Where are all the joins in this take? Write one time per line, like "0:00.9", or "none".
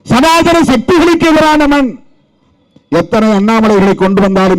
none